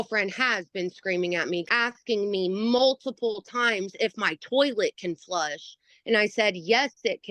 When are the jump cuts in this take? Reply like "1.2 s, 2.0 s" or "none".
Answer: 1.7 s